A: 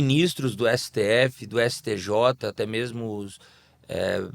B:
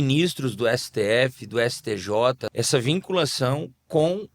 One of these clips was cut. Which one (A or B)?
B